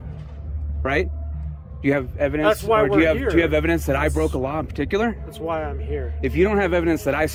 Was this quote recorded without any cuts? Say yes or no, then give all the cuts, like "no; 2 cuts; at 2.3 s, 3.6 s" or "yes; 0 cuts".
yes; 0 cuts